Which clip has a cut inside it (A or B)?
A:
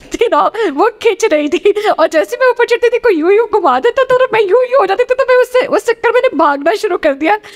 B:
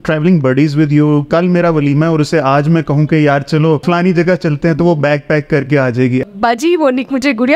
B